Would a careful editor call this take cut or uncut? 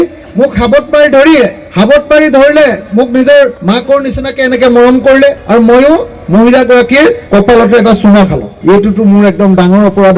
cut